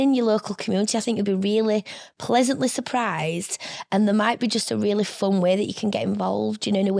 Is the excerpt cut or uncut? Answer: uncut